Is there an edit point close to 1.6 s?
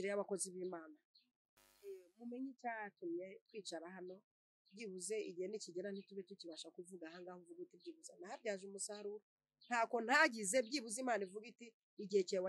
no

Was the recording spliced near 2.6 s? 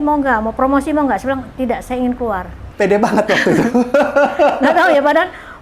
yes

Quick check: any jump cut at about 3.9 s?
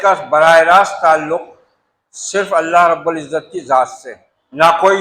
yes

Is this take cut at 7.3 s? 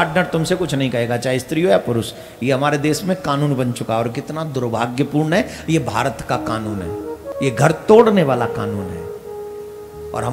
yes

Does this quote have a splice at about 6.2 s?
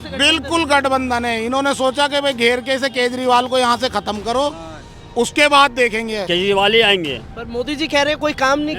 yes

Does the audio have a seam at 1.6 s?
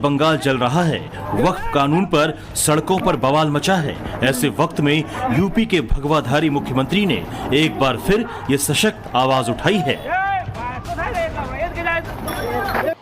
yes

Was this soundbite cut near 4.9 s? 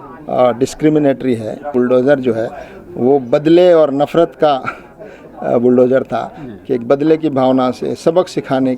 no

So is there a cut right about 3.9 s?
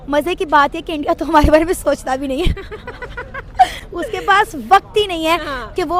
no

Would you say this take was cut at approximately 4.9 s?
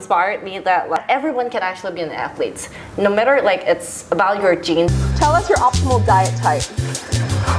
yes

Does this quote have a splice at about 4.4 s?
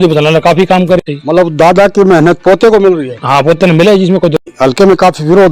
yes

